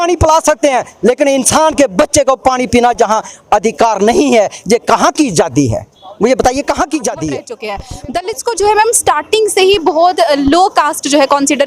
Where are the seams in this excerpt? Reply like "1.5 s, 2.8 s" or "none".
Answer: 7.9 s